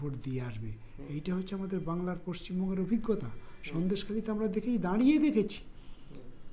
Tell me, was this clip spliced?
no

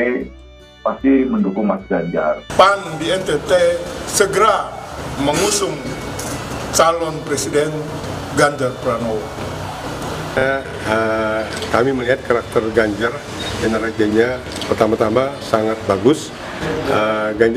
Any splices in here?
yes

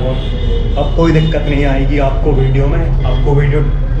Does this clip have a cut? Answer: no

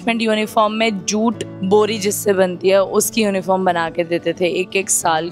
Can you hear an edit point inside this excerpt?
no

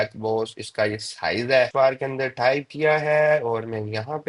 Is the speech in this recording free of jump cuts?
no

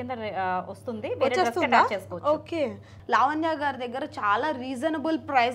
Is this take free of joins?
no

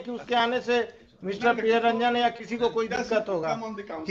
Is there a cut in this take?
no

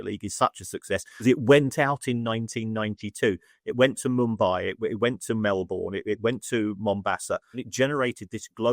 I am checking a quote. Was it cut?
yes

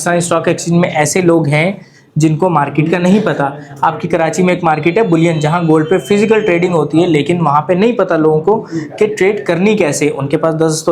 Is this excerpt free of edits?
yes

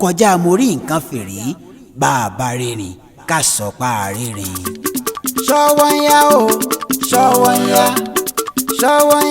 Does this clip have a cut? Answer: yes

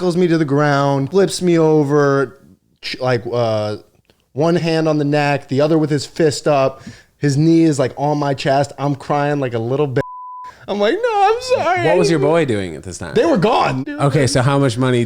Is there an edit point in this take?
yes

